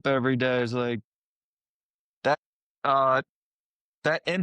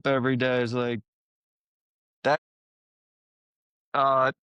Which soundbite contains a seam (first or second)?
first